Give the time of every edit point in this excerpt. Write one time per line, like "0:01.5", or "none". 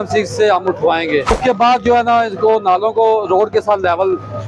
0:01.4